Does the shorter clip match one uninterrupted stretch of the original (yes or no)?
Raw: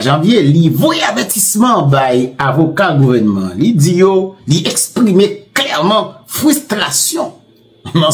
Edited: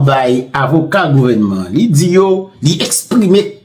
yes